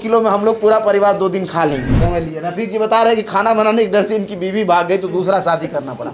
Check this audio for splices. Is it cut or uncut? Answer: cut